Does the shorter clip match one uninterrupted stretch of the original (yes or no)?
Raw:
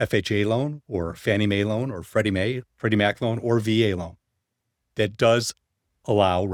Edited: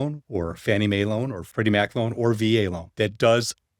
no